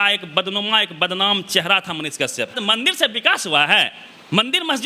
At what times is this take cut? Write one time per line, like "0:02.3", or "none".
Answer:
0:02.6

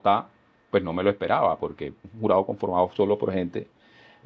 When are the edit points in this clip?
0:02.1

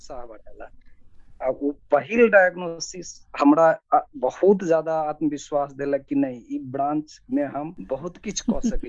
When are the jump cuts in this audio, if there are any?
none

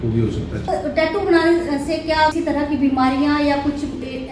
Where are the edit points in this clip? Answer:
0:00.7
0:02.3

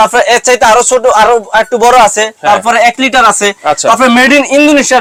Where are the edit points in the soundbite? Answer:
none

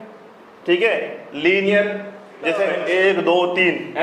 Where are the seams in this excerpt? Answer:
0:02.7

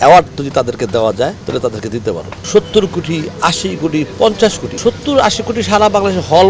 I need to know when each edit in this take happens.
0:01.4
0:02.4
0:04.7

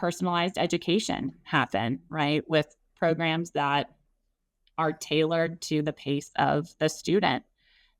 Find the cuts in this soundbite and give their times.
none

